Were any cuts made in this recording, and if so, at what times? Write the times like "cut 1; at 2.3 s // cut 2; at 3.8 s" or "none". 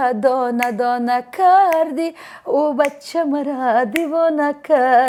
none

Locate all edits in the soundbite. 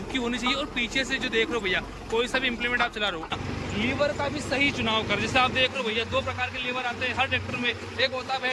cut 1; at 3.4 s

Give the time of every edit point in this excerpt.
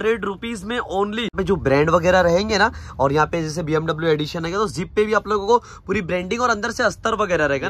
cut 1; at 1.3 s

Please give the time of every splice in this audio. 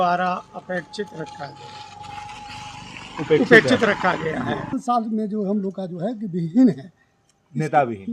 cut 1; at 4.7 s

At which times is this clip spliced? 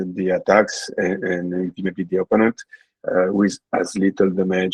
none

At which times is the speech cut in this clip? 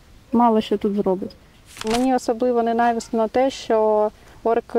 cut 1; at 1.9 s

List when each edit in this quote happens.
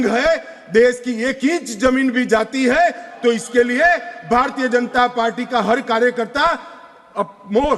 none

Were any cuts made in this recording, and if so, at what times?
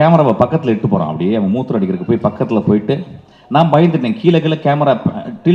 none

